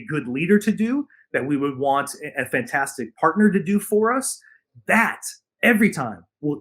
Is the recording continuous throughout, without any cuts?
yes; 0 cuts

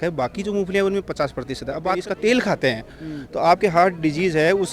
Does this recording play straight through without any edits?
no; 1 cut; at 1.9 s

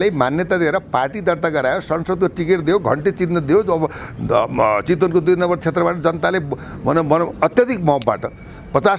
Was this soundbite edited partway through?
no; 0 cuts

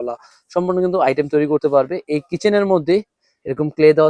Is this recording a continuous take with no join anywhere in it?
yes; 0 cuts

